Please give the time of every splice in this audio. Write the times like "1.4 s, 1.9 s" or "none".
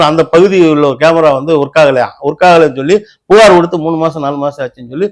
none